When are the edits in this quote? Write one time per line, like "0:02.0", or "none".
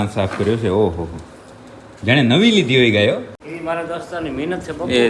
0:03.3